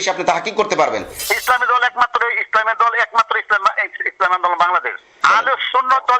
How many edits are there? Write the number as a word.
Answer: two